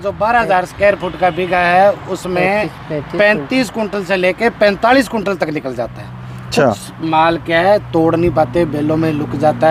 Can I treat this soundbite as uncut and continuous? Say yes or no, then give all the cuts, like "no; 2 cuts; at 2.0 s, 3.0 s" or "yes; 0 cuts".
yes; 0 cuts